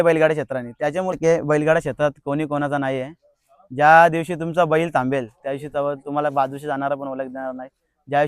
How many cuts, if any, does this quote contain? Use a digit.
1